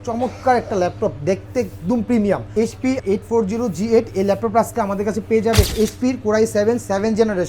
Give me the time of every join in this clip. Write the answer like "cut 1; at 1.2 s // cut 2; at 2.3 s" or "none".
cut 1; at 2.5 s // cut 2; at 5.7 s